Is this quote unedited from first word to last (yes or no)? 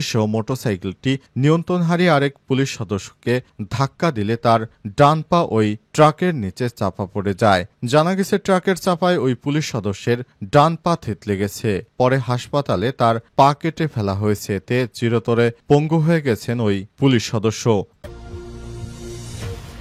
no